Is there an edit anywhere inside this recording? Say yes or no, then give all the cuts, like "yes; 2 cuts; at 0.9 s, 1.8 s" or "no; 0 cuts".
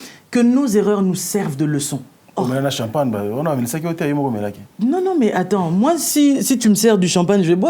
yes; 1 cut; at 2.2 s